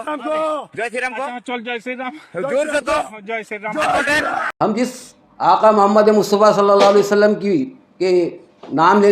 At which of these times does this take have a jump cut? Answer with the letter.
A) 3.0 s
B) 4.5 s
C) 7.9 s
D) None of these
B